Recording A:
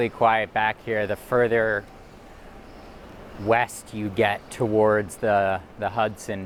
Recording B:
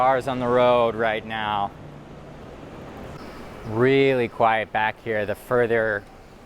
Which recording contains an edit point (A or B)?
B